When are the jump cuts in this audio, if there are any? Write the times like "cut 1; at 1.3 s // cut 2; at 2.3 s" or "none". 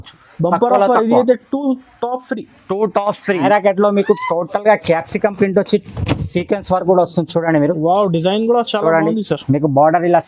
cut 1; at 3.5 s